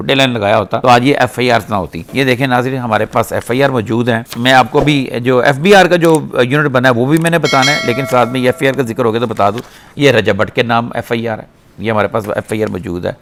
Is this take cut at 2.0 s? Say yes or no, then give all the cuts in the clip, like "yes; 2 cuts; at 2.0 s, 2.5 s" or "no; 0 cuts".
no; 0 cuts